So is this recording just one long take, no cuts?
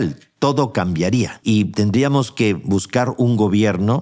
no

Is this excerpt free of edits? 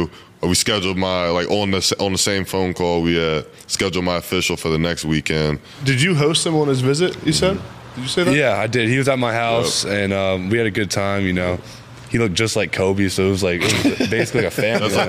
no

